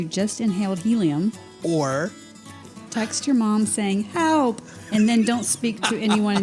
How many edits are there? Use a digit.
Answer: 1